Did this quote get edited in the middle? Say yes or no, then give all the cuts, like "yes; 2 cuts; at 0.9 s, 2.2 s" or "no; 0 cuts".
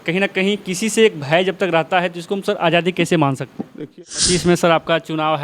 yes; 1 cut; at 3.8 s